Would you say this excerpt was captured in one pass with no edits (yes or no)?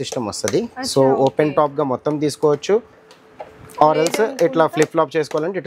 yes